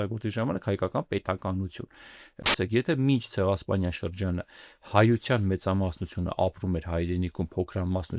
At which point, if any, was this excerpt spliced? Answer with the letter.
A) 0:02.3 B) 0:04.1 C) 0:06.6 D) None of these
A